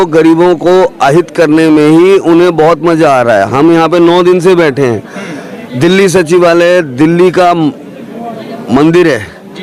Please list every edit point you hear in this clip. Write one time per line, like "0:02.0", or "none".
none